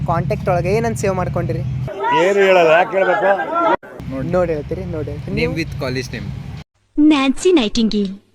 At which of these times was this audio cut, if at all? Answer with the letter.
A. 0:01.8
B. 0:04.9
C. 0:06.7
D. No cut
D